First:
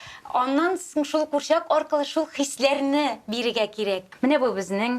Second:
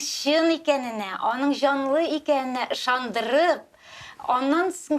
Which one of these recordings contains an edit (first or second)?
first